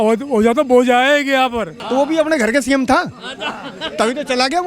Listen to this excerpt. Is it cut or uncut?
cut